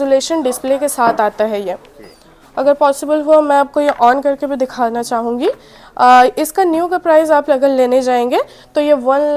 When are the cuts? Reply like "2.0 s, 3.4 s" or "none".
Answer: none